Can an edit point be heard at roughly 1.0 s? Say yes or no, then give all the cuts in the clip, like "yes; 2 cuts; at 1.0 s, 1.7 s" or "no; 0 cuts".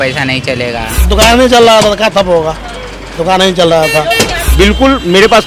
yes; 2 cuts; at 1.0 s, 4.4 s